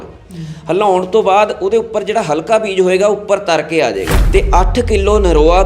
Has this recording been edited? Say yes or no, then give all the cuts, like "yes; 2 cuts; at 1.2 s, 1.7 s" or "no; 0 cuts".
yes; 1 cut; at 4.2 s